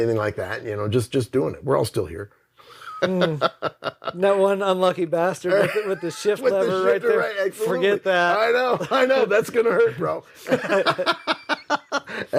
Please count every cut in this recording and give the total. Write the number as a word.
zero